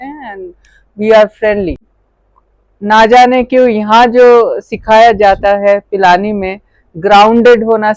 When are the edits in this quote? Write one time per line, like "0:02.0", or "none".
0:01.8